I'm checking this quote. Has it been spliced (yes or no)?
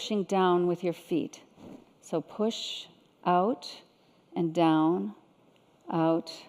yes